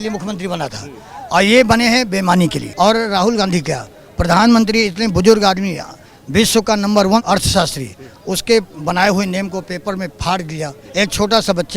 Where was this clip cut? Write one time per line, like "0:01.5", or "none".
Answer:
0:02.6
0:07.2
0:10.8

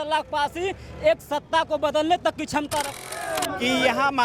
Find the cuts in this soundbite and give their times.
0:03.1

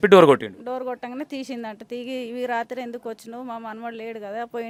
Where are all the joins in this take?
none

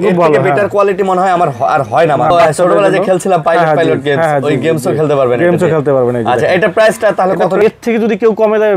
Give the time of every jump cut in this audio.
0:02.3
0:07.6

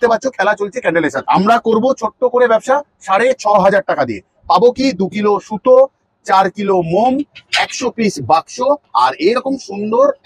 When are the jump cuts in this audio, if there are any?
0:01.2

